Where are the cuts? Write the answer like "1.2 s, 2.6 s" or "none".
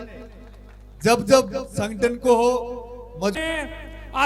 3.3 s

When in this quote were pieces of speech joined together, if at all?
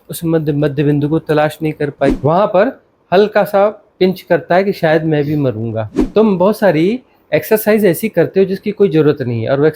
2.2 s, 5.9 s

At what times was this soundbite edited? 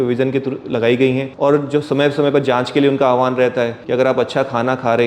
1.3 s, 3.8 s

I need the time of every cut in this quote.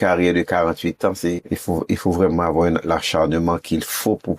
1.4 s

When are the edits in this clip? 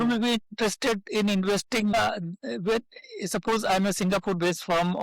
1.9 s

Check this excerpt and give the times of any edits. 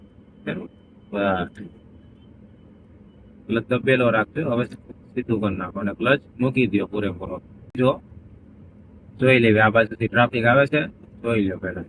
7.8 s

